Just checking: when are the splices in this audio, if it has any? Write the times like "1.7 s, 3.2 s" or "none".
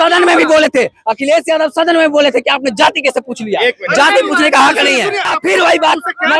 5.3 s